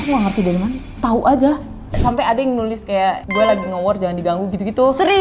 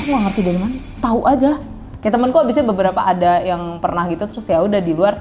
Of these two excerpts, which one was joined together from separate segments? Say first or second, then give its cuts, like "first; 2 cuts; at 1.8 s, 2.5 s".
first; 1 cut; at 2.0 s